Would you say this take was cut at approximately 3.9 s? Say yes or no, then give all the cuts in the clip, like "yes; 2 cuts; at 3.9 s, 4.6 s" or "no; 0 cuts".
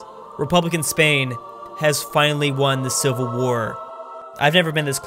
yes; 1 cut; at 3.9 s